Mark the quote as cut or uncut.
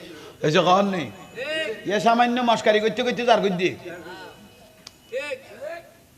uncut